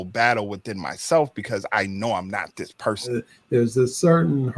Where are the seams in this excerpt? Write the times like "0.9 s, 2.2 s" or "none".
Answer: 3.1 s